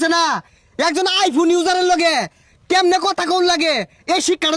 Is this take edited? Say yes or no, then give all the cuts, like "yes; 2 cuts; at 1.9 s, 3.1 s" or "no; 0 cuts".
no; 0 cuts